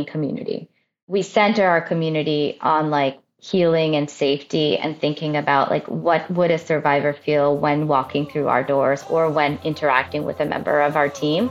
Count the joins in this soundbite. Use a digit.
1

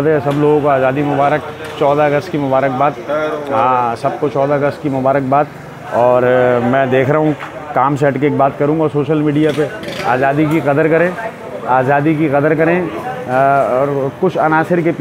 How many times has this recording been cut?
0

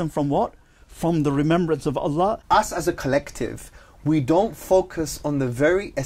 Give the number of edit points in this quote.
1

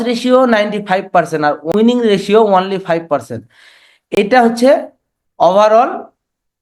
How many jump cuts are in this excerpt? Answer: 1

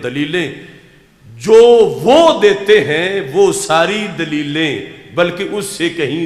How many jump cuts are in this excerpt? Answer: 0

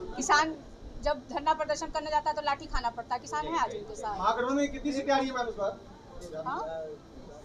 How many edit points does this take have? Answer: 0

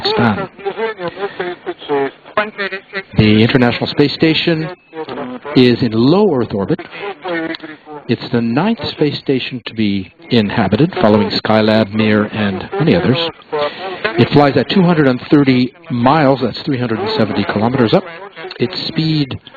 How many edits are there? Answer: 1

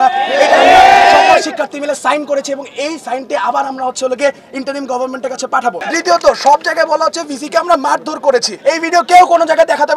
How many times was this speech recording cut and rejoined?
2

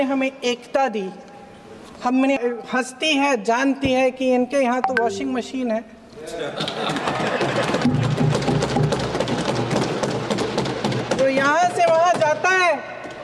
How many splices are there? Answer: 1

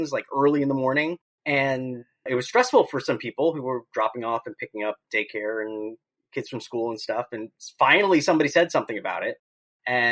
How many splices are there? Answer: 2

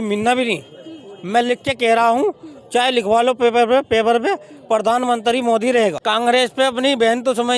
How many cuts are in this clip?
1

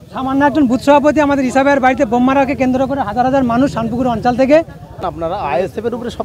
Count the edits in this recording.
1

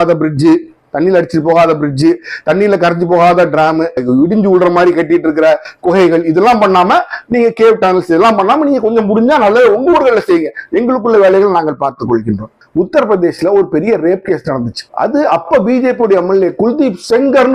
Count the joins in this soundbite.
1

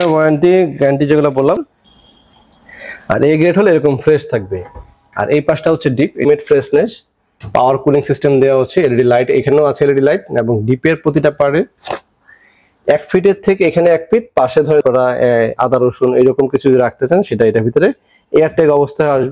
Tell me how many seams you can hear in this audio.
3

